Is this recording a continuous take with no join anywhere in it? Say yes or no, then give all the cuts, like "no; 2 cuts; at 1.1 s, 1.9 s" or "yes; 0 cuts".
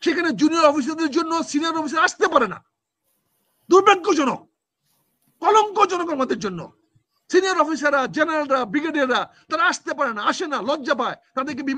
yes; 0 cuts